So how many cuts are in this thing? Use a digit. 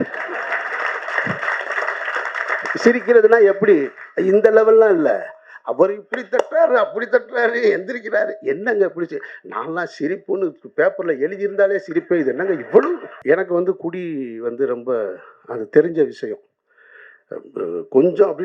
1